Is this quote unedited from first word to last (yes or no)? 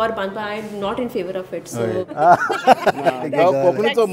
no